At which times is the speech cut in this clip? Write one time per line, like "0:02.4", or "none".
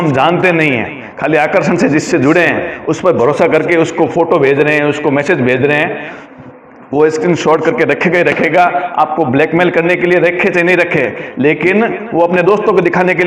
none